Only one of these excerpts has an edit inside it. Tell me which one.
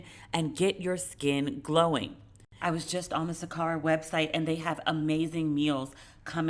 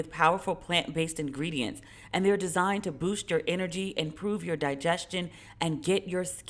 first; 1 cut; at 2.4 s

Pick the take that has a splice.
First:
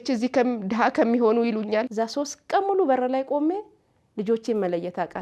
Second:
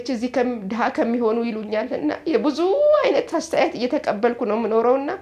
first; 1 cut; at 1.9 s

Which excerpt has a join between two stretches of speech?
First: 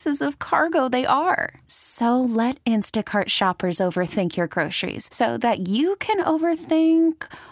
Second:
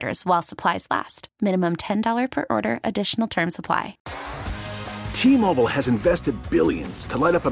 second; 1 cut; at 4.0 s

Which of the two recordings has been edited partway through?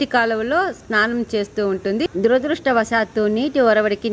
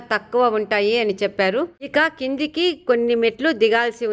second; 1 cut; at 1.9 s

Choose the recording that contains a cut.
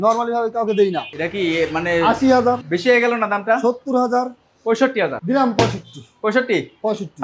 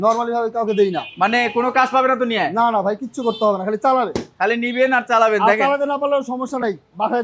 first; 3 cuts; at 1.1 s, 2.6 s, 5.2 s

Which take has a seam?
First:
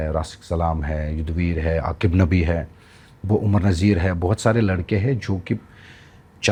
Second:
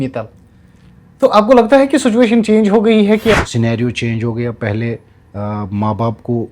second; 1 cut; at 3.3 s

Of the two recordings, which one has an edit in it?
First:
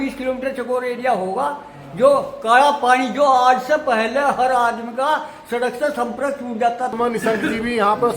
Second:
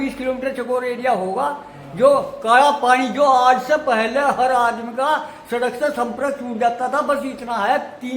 first; 1 cut; at 6.9 s

